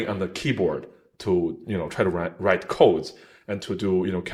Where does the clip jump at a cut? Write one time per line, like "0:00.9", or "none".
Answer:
none